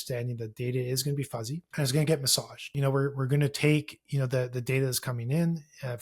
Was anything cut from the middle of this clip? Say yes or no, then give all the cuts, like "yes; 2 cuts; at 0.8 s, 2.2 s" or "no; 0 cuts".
yes; 2 cuts; at 1.7 s, 2.7 s